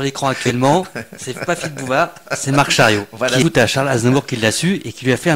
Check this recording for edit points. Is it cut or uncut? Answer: cut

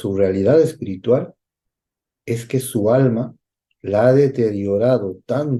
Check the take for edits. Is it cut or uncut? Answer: uncut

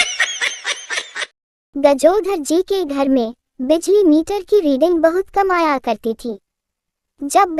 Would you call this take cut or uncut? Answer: uncut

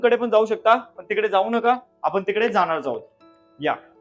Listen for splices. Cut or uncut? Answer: uncut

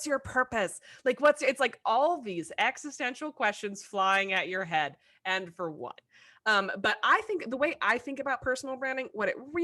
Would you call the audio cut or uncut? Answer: uncut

